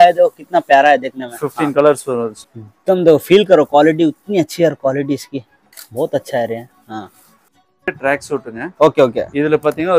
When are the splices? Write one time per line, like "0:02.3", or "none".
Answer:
0:02.4
0:07.9